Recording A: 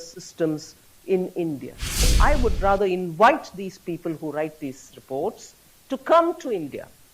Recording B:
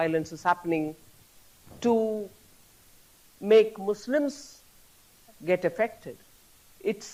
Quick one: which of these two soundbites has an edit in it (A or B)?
A